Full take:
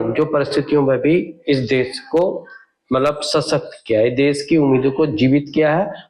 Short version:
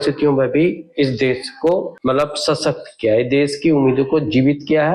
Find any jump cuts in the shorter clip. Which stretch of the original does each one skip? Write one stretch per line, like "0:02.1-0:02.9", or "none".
0:02.4-0:02.8